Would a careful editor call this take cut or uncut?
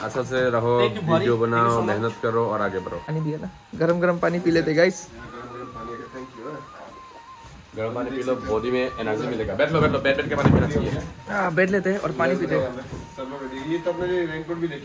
uncut